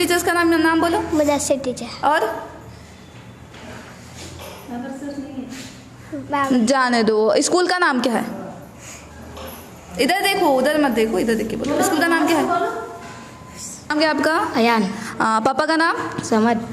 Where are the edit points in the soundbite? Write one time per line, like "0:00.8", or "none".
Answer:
0:13.9